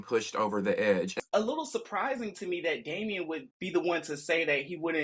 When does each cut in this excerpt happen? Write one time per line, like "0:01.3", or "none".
0:01.2